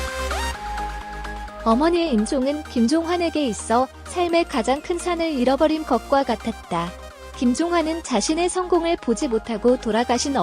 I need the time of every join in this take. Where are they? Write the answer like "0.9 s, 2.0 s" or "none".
1.6 s